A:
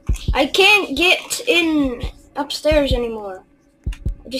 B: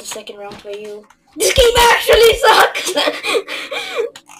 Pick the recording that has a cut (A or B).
B